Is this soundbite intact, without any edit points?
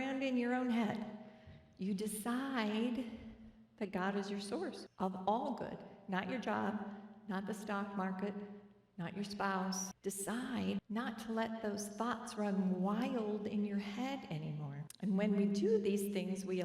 no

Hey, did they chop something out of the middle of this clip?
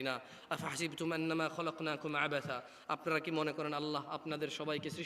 no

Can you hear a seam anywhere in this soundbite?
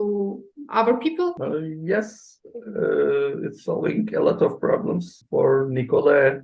yes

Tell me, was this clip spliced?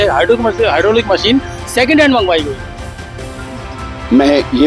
no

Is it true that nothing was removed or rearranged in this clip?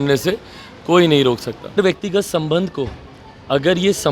no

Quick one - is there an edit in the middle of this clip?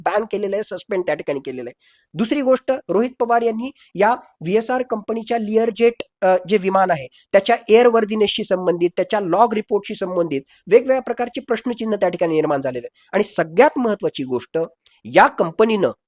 no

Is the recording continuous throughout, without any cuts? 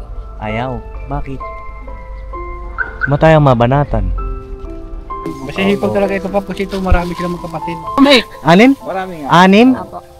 no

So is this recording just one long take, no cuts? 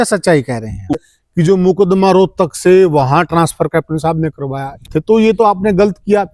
no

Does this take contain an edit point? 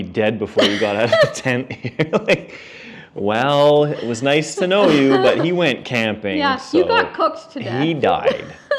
no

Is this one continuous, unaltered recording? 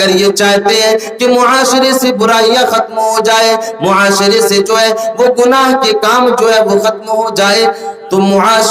yes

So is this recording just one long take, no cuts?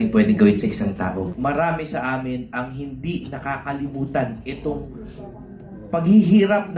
no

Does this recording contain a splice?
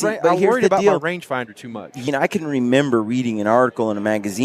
yes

